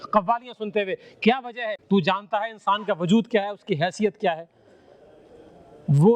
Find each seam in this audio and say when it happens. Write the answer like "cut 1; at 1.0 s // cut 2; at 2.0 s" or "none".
cut 1; at 1.7 s